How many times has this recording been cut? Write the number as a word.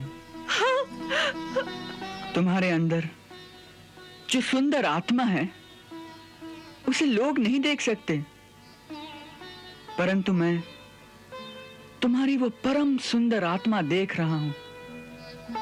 zero